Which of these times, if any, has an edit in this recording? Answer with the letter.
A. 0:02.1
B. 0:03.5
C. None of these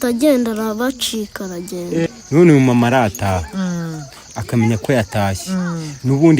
A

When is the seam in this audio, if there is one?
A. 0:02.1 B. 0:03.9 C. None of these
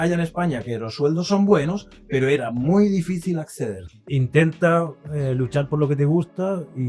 B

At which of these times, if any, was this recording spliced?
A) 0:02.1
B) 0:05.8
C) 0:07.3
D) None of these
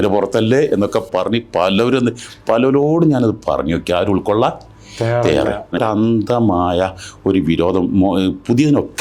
B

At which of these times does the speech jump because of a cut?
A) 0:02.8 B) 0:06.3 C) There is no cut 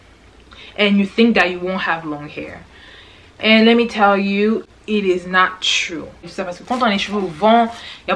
B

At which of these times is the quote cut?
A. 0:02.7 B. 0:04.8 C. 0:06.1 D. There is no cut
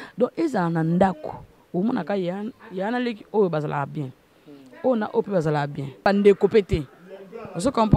C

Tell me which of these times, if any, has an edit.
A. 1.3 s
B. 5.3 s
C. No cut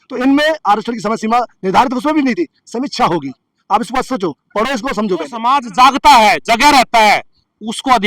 B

